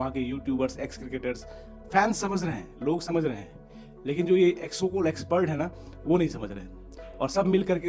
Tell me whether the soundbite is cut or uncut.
uncut